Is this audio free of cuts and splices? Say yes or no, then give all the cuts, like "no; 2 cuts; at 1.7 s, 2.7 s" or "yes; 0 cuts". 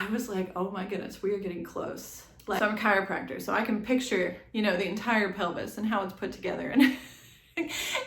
no; 1 cut; at 2.6 s